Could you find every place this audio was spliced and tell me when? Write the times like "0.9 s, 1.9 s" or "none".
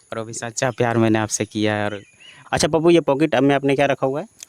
2.4 s